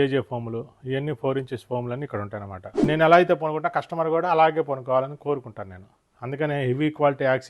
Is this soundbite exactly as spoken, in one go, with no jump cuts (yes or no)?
no